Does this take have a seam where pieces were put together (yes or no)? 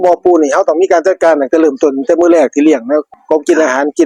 yes